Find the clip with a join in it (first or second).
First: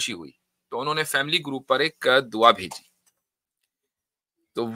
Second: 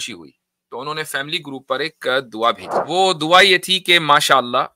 second